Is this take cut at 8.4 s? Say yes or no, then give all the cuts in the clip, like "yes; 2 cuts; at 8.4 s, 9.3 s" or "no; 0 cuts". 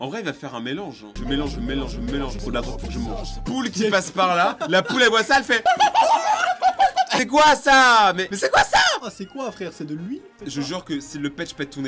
no; 3 cuts; at 3.4 s, 7.1 s, 10.3 s